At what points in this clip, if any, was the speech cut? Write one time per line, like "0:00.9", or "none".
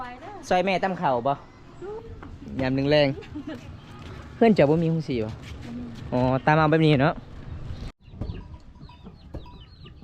0:02.0
0:07.9